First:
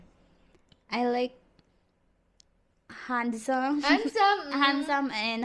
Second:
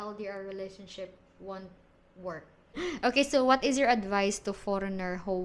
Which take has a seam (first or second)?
second